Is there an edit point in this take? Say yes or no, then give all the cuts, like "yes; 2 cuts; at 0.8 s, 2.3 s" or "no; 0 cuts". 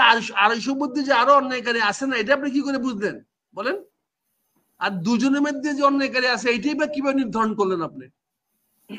no; 0 cuts